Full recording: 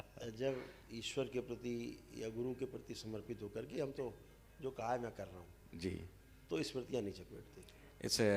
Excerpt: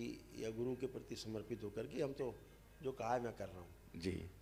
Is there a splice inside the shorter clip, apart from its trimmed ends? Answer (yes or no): no